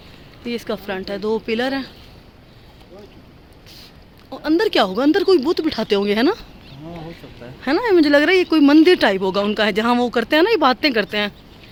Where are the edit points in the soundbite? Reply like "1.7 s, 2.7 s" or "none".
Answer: none